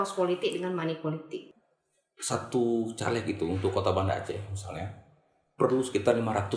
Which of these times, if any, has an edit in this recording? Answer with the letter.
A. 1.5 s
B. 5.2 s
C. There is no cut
A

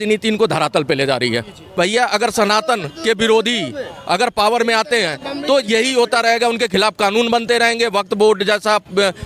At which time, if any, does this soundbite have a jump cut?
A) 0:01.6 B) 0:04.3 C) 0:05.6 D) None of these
A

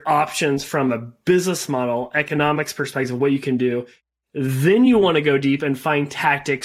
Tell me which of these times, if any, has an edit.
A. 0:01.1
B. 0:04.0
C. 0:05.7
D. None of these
B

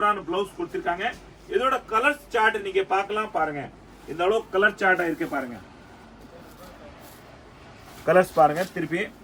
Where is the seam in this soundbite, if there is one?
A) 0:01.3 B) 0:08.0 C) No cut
C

